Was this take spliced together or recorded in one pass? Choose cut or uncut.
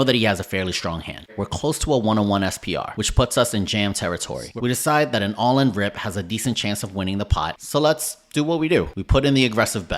cut